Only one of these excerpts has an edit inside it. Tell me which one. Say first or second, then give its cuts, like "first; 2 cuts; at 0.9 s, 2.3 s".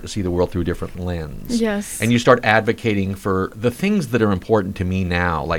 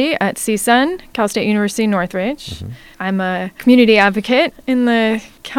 first; 2 cuts; at 1.0 s, 3.5 s